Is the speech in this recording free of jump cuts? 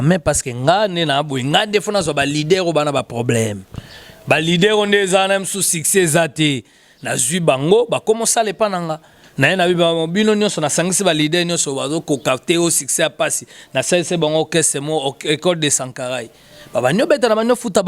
yes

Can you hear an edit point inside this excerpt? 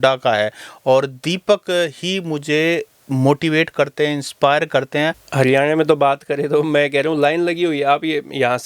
yes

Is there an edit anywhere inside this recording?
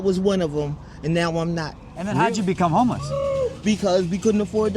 yes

